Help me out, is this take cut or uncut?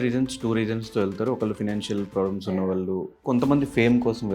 cut